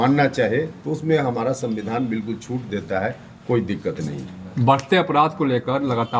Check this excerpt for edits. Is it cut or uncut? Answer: uncut